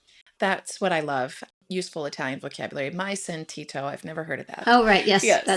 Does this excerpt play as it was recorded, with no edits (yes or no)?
no